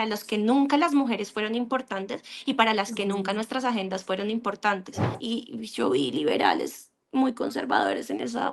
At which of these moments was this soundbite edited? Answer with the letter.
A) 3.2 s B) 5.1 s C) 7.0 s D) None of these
B